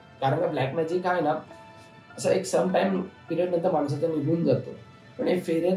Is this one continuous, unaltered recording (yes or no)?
yes